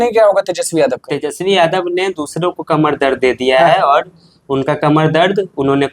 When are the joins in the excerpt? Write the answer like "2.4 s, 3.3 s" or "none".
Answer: none